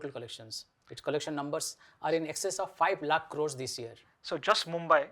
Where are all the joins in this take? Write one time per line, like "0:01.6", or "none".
none